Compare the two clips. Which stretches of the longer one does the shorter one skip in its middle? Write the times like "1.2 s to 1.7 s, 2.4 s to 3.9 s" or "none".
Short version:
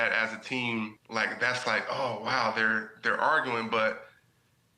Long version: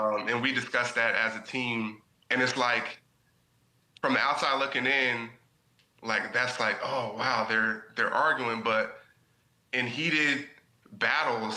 2.0 s to 5.9 s